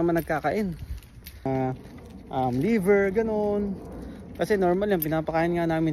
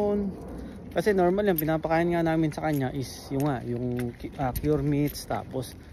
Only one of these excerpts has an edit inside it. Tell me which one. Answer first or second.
first